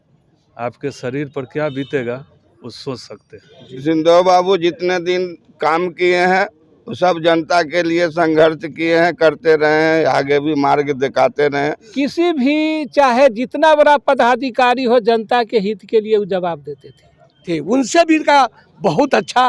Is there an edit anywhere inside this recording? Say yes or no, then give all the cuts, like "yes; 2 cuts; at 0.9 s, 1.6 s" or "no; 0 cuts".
yes; 3 cuts; at 3.8 s, 11.9 s, 17.4 s